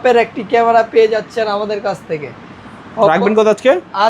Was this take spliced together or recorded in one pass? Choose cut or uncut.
uncut